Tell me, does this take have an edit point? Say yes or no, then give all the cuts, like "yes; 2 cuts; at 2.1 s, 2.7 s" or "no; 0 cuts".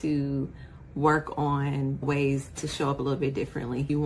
yes; 1 cut; at 2.0 s